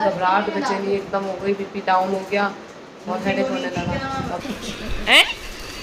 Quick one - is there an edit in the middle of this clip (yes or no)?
yes